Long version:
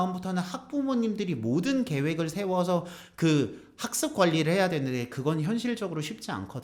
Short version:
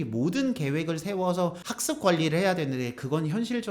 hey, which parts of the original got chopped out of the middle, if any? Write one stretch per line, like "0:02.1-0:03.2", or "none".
0:03.0-0:03.8